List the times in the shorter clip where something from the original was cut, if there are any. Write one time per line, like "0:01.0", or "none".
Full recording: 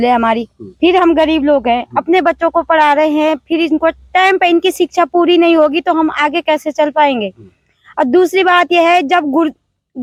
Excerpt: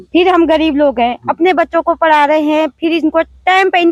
none